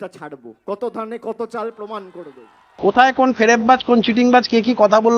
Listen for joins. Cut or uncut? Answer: cut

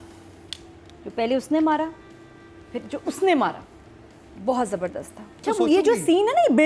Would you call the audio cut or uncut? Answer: cut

